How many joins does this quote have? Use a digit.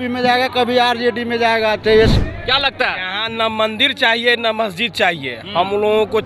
1